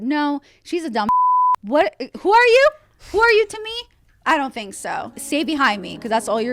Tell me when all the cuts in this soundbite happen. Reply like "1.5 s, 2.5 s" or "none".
5.1 s

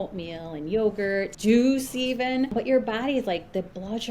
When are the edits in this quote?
1.3 s, 2.5 s

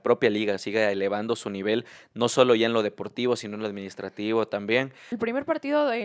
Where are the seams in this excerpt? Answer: 5.1 s

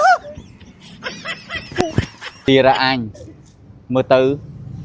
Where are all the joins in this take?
2.5 s

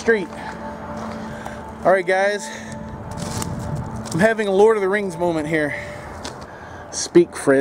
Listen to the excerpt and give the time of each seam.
1.3 s, 6.5 s

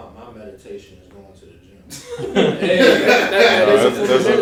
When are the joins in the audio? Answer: none

